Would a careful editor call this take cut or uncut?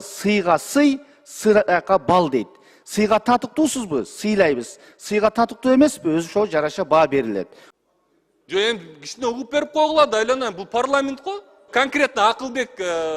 cut